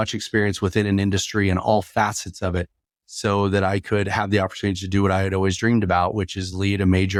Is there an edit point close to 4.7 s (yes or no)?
no